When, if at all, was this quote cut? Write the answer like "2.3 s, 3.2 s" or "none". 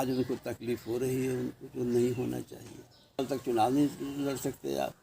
3.2 s